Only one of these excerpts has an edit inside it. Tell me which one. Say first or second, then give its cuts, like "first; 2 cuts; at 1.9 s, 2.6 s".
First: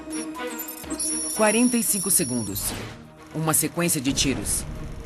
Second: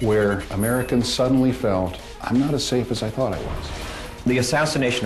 second; 1 cut; at 4.1 s